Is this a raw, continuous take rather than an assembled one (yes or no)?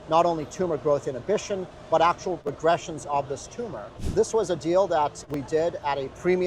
no